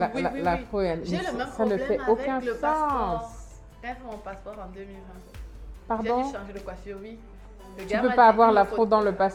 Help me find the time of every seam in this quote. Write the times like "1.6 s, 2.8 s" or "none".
none